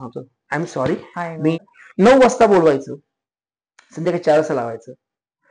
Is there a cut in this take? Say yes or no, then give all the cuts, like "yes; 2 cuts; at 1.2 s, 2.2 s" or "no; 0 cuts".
yes; 1 cut; at 1.6 s